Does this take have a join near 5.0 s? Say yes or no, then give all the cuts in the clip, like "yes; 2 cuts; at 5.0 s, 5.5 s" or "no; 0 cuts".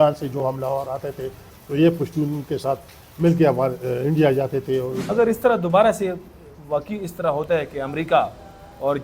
yes; 1 cut; at 5.0 s